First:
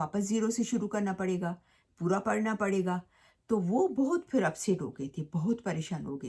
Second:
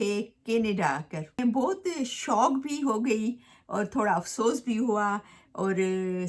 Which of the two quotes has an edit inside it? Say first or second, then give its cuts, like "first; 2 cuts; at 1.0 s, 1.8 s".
second; 1 cut; at 1.4 s